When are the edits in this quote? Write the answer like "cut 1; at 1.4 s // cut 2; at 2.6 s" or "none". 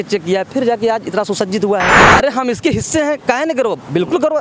cut 1; at 2.1 s